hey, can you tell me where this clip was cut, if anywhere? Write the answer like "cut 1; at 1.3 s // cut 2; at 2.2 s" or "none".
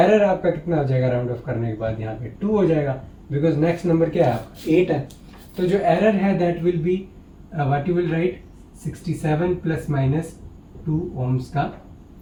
none